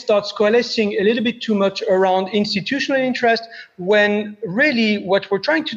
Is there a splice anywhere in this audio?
no; 0 cuts

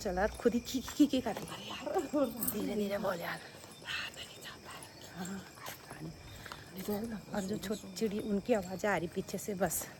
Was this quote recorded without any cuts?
yes; 0 cuts

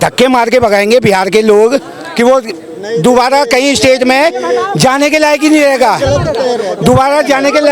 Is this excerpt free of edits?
yes; 0 cuts

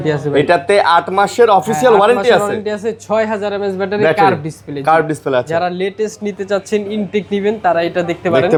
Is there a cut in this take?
no; 0 cuts

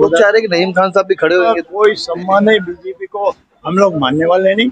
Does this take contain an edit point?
yes; 1 cut; at 1.6 s

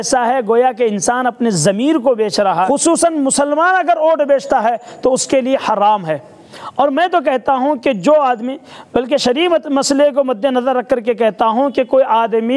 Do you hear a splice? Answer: yes; 1 cut; at 2.7 s

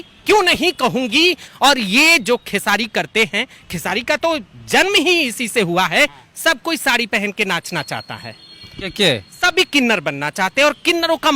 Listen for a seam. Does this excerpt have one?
yes; 2 cuts; at 1.5 s, 6.2 s

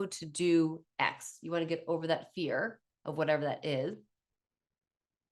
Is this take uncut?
yes; 0 cuts

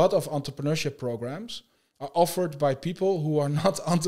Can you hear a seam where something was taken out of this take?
no; 0 cuts

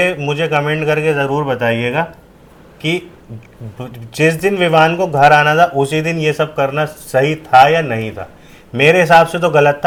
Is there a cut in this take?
no; 0 cuts

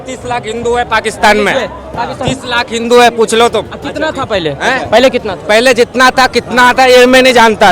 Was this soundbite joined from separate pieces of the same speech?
no; 0 cuts

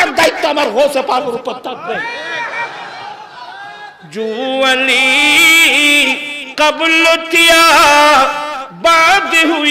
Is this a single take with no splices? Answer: yes; 0 cuts

